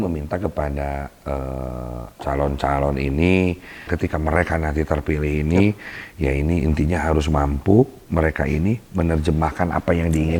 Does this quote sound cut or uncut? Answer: cut